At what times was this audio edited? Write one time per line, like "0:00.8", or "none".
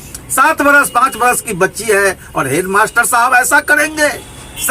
none

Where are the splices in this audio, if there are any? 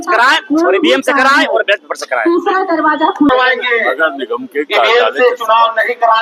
none

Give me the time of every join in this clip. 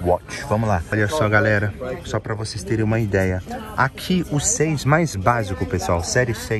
0:00.9
0:03.5

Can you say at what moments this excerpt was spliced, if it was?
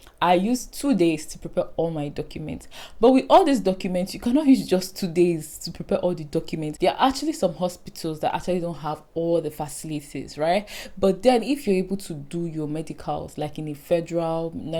0:06.6

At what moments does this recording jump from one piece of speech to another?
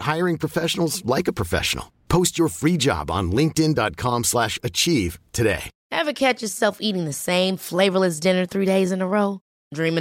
0:05.7

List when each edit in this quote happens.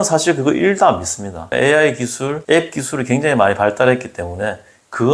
0:01.5
0:02.4

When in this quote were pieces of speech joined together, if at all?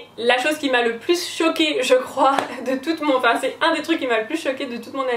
none

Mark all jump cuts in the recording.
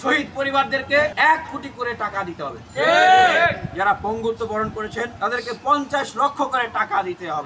0:01.1
0:05.1

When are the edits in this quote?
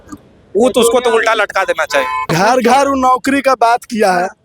0:02.3

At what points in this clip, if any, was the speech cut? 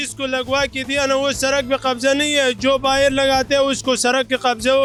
none

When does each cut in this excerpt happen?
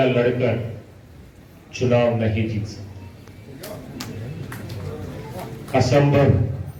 none

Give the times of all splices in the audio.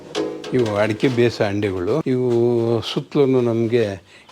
0:02.0

